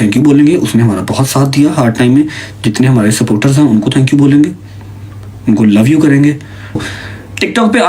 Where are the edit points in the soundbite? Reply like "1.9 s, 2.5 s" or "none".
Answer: 6.8 s